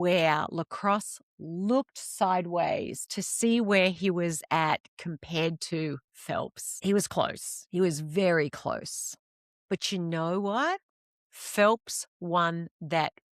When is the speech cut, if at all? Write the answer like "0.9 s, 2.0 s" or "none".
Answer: 6.6 s

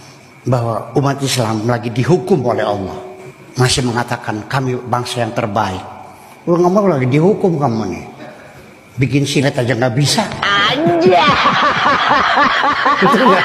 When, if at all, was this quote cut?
none

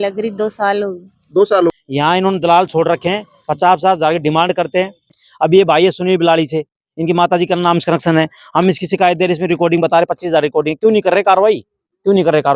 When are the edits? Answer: 1.7 s, 5.2 s

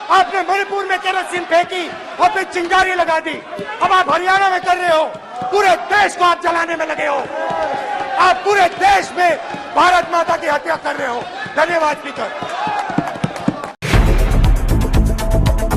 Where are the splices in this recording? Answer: none

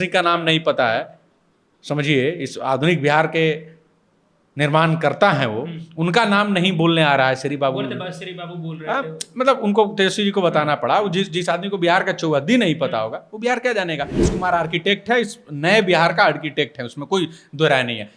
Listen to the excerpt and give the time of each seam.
14.3 s

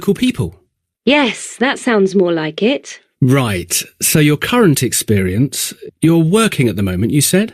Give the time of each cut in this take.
none

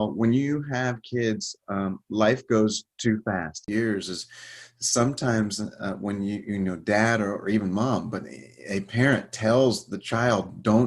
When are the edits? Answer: 3.6 s

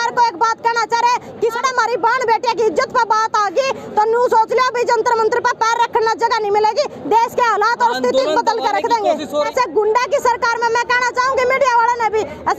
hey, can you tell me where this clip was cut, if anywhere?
1.6 s, 9.3 s

